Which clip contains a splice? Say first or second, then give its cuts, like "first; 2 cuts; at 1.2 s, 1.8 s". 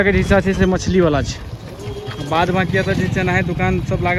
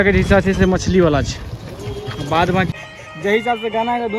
second; 1 cut; at 2.7 s